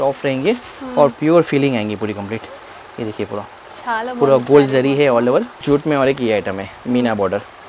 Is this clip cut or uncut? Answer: cut